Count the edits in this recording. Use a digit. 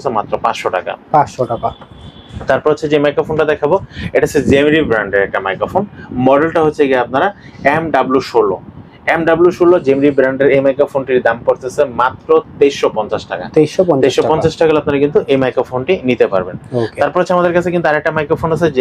0